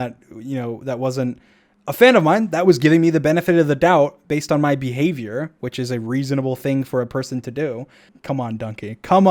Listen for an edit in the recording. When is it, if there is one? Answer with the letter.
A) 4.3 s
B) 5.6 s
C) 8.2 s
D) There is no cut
D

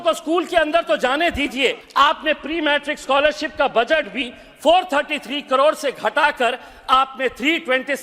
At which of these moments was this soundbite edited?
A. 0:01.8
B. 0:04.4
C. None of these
A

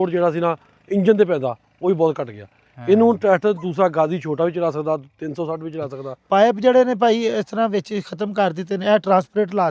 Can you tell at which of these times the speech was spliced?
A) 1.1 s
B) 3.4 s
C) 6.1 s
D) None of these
C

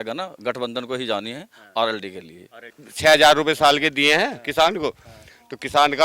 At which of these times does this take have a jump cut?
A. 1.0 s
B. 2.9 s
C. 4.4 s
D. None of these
B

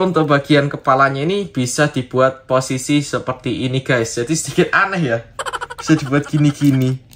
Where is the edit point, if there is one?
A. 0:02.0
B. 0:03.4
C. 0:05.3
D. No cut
D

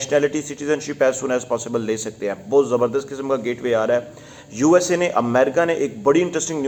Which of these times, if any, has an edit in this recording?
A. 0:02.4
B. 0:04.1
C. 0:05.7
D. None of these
D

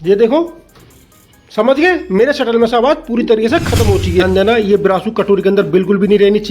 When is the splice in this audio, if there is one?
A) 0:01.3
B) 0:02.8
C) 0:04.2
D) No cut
C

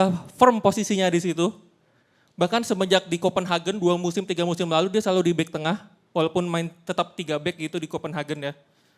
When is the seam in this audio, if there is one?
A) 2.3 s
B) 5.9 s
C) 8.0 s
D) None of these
D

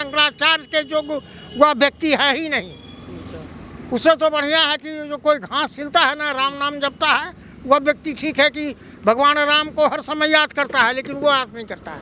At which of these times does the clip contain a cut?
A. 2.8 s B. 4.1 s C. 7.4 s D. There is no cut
D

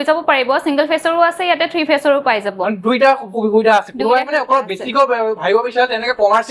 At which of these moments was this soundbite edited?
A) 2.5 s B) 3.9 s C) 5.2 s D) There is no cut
D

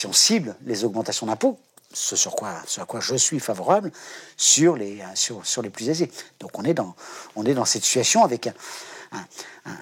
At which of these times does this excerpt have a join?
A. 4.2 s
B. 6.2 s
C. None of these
C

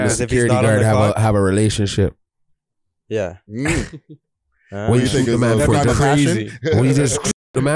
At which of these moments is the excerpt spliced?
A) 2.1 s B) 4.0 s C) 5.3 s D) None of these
D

